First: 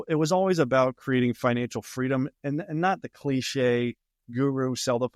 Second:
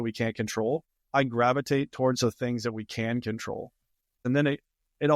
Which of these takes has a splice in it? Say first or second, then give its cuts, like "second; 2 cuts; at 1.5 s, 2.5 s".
second; 2 cuts; at 1.0 s, 4.2 s